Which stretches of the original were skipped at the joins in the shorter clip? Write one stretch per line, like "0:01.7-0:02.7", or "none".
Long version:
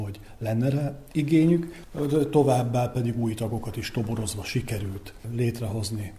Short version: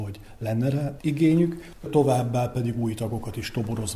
0:00.9-0:01.1
0:02.0-0:02.3